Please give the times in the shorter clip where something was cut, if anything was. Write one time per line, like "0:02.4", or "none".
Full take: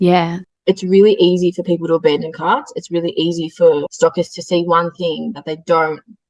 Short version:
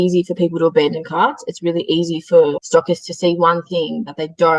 none